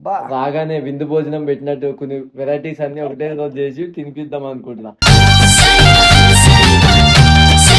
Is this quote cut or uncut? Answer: uncut